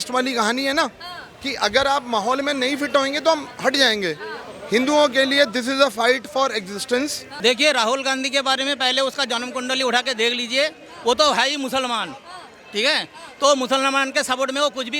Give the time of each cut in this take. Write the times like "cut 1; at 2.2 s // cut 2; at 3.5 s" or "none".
cut 1; at 7.2 s